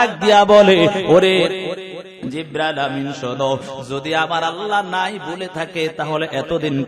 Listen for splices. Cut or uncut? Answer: uncut